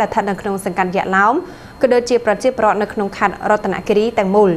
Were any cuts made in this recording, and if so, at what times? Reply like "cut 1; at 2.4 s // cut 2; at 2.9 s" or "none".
none